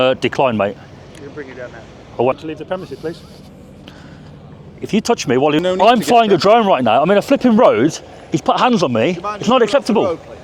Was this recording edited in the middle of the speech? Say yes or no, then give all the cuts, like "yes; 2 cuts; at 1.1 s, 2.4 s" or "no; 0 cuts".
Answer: yes; 2 cuts; at 2.3 s, 5.6 s